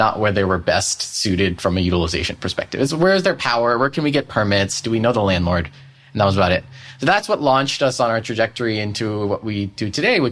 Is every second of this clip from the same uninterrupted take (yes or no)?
yes